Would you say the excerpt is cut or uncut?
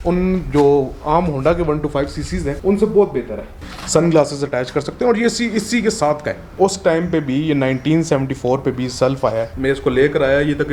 cut